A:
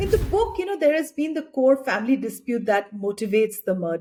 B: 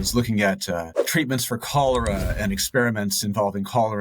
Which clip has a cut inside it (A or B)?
B